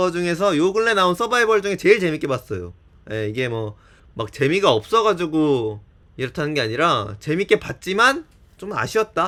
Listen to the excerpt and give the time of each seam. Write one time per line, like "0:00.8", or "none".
none